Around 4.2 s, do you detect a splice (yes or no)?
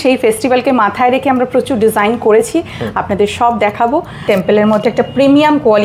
yes